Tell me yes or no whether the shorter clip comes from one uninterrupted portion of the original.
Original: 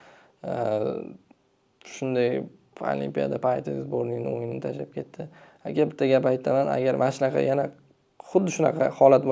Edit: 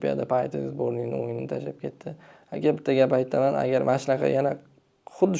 yes